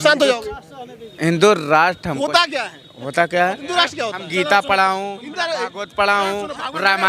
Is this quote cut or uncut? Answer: cut